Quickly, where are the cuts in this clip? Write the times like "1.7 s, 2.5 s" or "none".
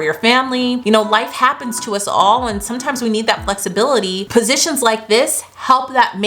0.8 s, 4.2 s

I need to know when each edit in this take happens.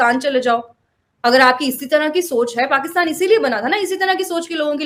none

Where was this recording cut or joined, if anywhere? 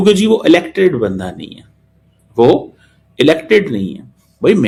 none

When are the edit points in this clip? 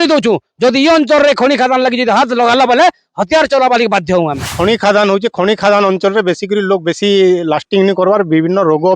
4.5 s

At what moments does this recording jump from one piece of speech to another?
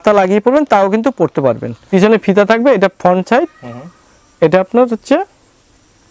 1.8 s

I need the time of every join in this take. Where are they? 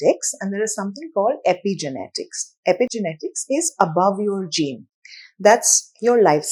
none

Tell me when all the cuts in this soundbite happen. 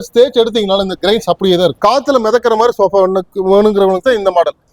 1.8 s

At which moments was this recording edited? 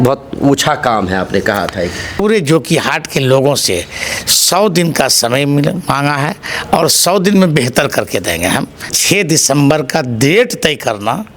2.2 s, 9.0 s

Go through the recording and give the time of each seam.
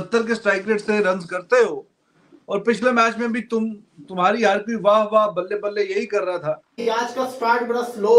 6.8 s

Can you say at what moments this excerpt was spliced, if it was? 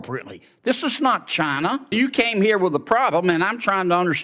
1.9 s

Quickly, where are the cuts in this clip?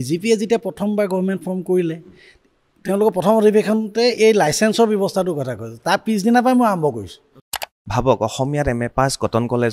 7.8 s

